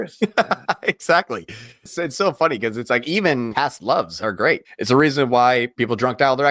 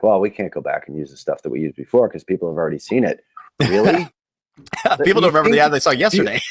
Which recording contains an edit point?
first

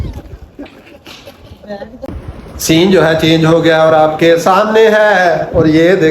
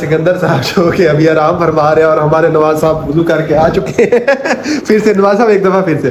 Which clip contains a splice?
first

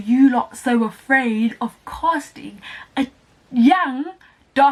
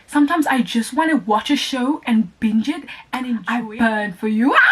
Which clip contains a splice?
second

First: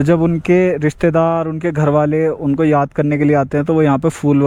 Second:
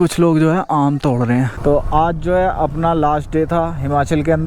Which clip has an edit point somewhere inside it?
second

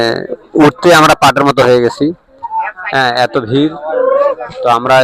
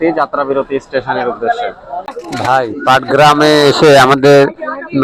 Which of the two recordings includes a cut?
second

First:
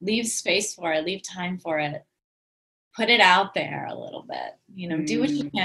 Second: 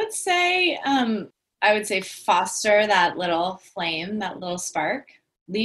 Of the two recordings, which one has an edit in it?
second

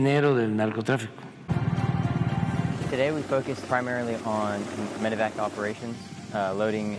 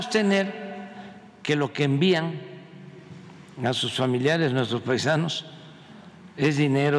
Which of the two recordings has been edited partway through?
first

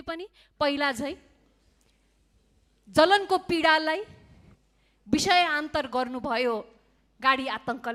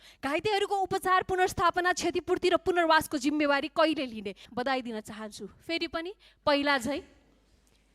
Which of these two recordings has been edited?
second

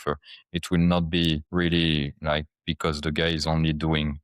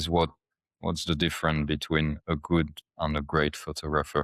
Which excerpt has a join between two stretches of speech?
first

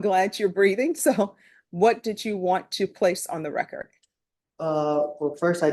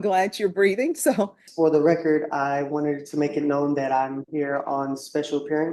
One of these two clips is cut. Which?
second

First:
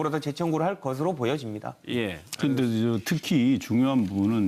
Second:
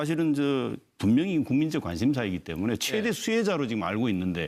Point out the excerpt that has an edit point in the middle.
first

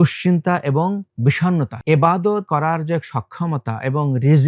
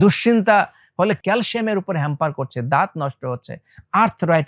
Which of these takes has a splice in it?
first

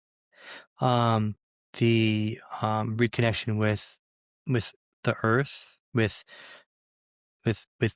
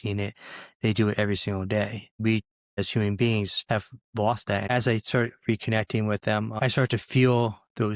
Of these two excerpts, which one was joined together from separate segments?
second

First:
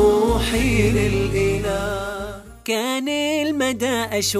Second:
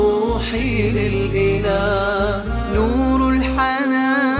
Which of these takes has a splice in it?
second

